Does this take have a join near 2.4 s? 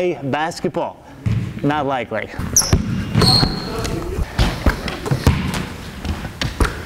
yes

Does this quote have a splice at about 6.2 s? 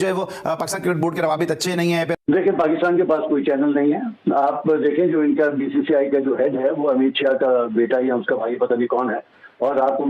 no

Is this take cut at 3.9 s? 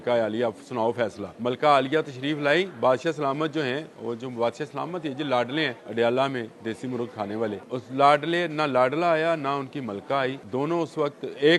no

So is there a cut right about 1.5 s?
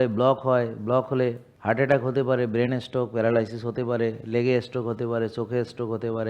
yes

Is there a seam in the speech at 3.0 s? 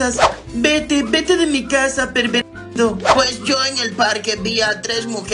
yes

